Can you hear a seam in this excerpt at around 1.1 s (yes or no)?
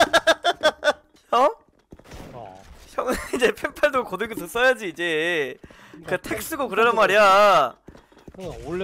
yes